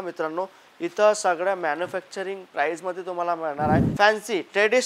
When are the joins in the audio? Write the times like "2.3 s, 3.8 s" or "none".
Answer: 3.9 s